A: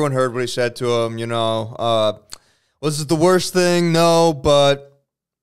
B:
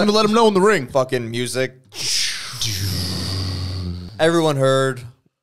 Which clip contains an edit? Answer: B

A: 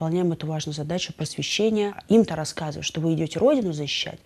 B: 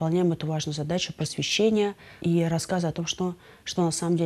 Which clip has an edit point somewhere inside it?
A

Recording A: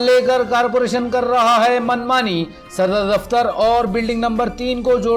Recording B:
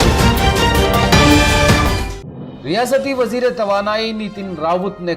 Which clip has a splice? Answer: B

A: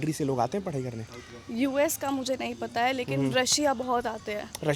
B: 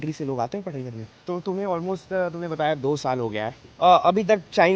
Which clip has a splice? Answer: B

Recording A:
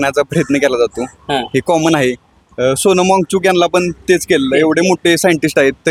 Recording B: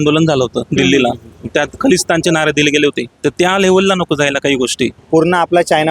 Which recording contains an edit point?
B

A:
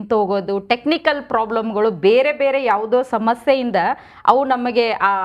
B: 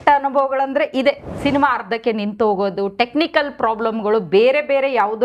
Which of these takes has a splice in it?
B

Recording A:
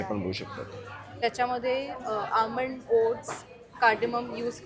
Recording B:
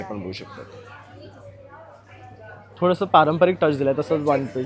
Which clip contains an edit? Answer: A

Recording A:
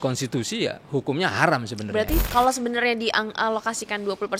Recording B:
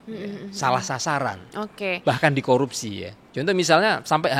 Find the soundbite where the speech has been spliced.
A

